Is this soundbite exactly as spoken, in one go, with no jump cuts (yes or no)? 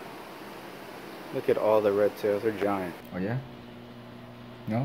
no